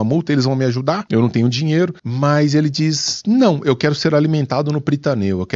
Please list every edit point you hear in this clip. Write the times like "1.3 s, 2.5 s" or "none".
1.0 s, 2.0 s